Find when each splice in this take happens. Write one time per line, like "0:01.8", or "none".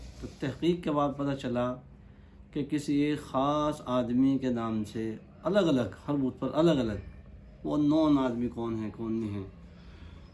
none